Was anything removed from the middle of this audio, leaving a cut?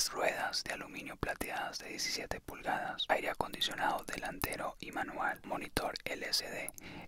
yes; 2 cuts; at 3.0 s, 5.4 s

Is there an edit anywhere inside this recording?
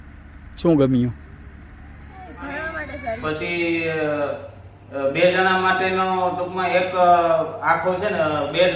yes; 1 cut; at 3.2 s

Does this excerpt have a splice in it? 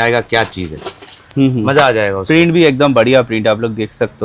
yes; 1 cut; at 1.2 s

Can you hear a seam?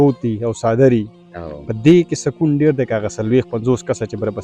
no; 0 cuts

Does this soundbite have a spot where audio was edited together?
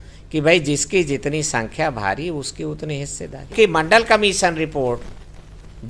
yes; 1 cut; at 3.5 s

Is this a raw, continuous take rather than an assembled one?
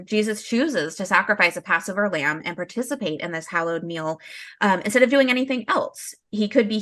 yes; 0 cuts

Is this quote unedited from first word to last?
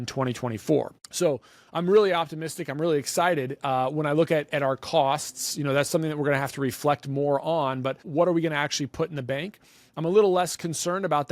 no; 2 cuts; at 1.0 s, 8.0 s

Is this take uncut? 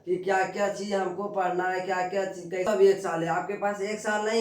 no; 1 cut; at 2.7 s

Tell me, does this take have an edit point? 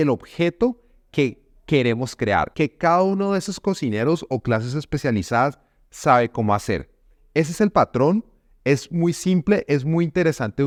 no; 0 cuts

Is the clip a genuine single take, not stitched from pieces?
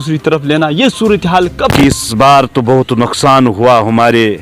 no; 1 cut; at 1.8 s

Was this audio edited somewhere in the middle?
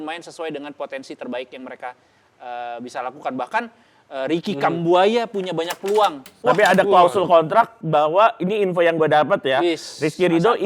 yes; 1 cut; at 6.3 s

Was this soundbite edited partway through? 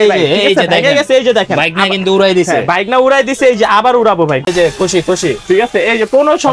yes; 1 cut; at 4.5 s

